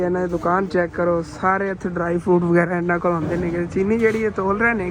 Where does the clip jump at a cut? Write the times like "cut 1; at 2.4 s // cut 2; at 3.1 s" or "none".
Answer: none